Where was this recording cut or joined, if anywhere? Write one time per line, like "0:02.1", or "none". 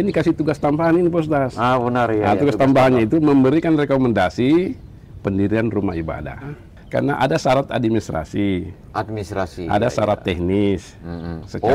0:06.5